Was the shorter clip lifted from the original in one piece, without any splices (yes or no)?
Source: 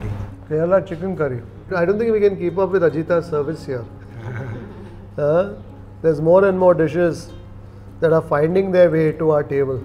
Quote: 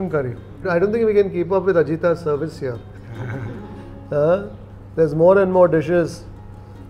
yes